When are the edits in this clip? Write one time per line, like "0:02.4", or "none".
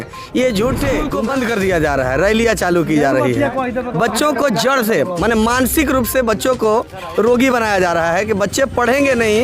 0:01.1